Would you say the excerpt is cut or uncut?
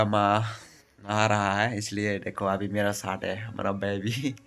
uncut